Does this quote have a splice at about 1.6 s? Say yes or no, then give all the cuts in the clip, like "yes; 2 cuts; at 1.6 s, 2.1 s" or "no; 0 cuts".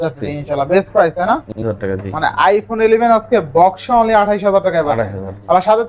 yes; 1 cut; at 1.6 s